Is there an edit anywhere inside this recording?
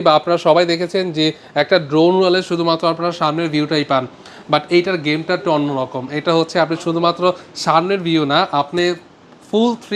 no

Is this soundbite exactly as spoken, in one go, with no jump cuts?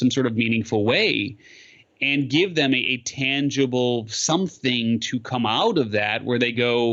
yes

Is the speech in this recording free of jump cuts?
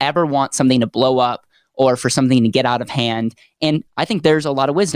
no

